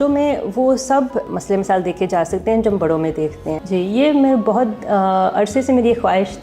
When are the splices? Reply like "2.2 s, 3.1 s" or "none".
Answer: 1.3 s, 3.6 s